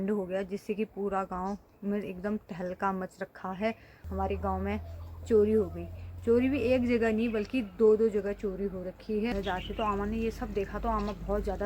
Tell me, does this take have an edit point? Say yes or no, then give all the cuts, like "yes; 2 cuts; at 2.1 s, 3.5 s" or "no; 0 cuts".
yes; 2 cuts; at 4.0 s, 9.3 s